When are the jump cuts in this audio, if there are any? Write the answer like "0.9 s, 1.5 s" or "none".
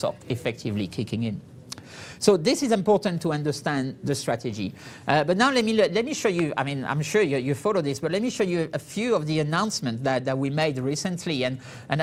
none